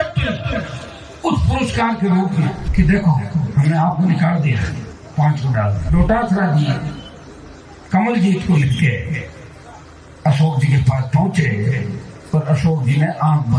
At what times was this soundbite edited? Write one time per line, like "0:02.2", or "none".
0:02.6
0:05.8